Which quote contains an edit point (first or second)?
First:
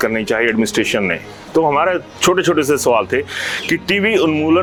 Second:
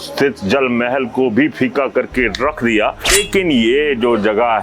second